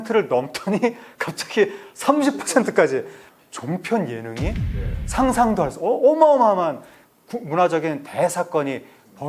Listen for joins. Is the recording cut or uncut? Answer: uncut